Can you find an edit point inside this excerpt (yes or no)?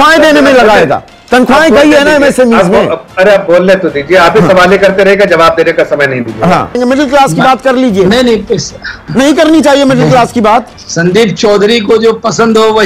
yes